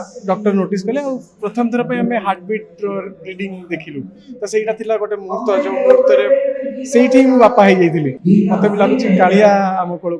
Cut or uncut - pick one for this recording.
cut